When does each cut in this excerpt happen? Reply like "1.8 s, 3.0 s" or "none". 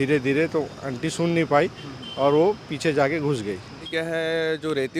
3.9 s